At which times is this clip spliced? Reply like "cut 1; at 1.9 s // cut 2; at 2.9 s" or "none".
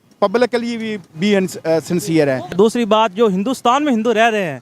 cut 1; at 2.5 s